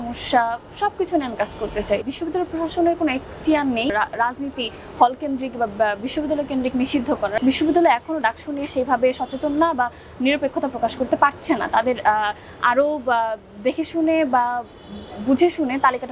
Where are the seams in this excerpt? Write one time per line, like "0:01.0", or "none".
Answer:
0:02.1
0:03.9
0:07.4